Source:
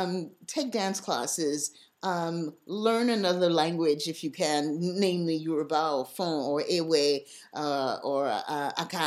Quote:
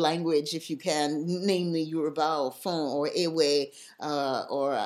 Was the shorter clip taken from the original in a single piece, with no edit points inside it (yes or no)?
yes